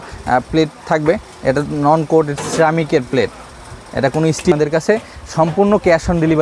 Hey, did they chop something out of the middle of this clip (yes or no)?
yes